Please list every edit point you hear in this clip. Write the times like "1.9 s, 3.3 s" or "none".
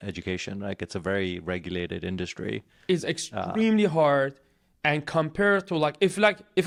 none